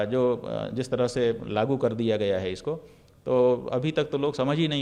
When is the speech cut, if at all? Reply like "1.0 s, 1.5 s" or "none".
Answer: none